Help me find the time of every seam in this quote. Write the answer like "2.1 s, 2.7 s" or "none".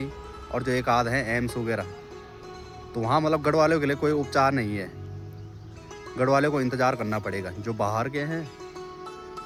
none